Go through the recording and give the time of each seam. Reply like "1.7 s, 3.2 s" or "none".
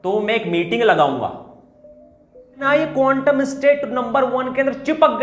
2.7 s

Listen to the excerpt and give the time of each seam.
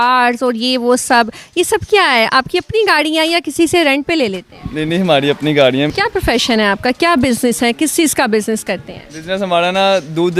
5.9 s

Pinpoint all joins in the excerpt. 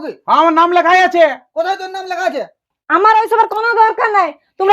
2.7 s

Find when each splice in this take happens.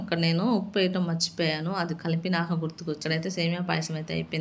3.0 s

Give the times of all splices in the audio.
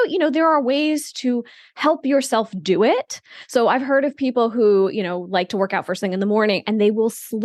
none

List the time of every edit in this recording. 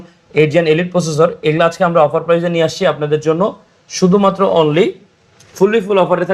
none

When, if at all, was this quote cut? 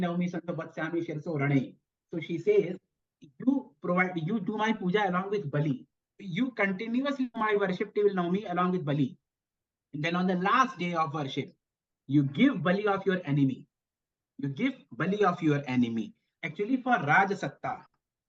5.9 s, 16.3 s

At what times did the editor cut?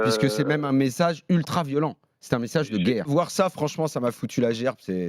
3.1 s

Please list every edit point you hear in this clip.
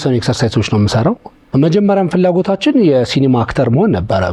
1.4 s

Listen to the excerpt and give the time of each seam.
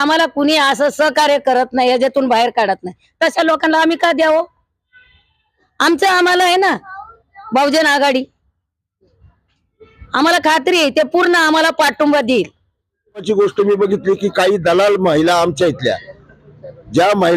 13.2 s

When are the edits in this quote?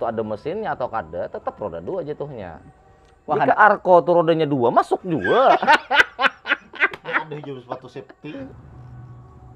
8.4 s

